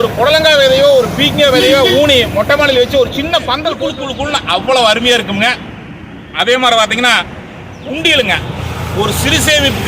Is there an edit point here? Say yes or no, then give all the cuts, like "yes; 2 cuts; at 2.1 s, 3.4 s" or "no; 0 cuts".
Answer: yes; 1 cut; at 3.9 s